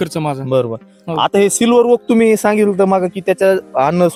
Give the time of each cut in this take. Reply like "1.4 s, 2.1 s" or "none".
none